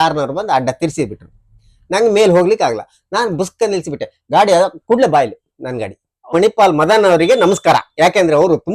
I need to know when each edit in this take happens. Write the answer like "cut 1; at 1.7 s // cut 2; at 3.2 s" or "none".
cut 1; at 6.3 s